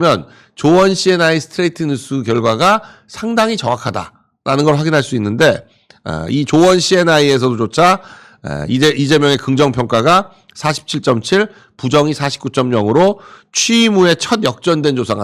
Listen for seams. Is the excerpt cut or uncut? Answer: uncut